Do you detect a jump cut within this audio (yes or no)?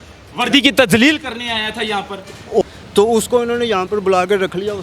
yes